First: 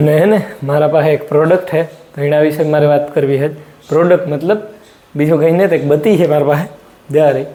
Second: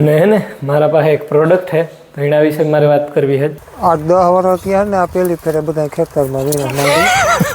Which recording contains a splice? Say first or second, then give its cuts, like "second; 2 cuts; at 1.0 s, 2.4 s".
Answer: second; 1 cut; at 3.7 s